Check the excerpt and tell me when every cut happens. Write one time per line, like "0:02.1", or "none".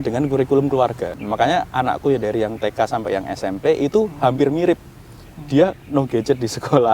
0:01.2

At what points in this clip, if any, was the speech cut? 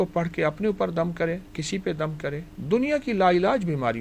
0:01.5
0:02.5

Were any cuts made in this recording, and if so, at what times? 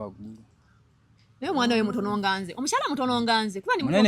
none

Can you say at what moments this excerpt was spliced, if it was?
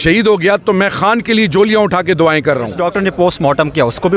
0:02.8

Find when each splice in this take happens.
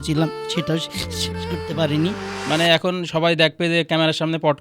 0:02.3

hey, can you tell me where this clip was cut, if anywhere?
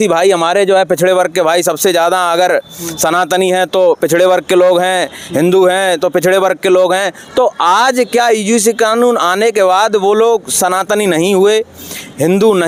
none

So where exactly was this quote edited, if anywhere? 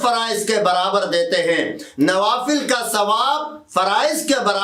none

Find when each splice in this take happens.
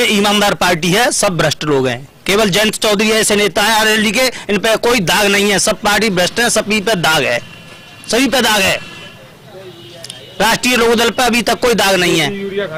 none

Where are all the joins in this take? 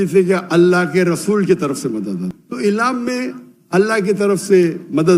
0:02.3

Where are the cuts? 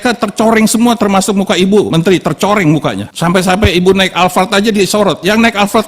0:01.9
0:03.1

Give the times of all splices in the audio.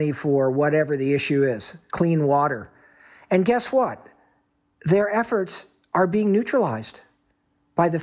none

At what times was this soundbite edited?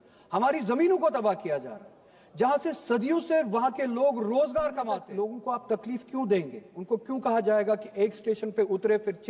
0:05.1

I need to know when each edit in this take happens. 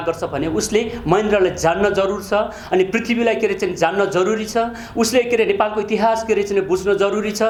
none

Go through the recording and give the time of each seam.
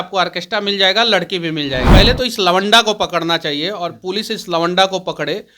0:01.9

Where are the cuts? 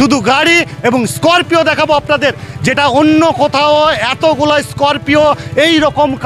none

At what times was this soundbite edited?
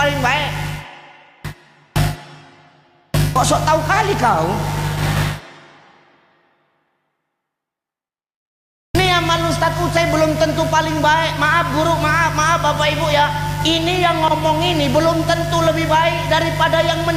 none

